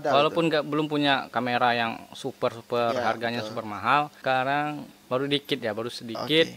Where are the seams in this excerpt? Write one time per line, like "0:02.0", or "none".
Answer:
0:04.2